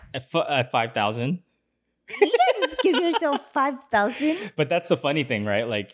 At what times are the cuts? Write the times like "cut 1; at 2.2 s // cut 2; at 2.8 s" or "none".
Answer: none